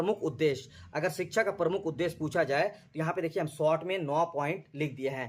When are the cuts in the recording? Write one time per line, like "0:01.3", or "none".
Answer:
none